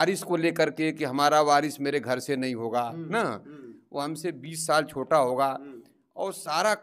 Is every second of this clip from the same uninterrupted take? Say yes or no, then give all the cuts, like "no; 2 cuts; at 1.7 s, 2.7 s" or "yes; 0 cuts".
yes; 0 cuts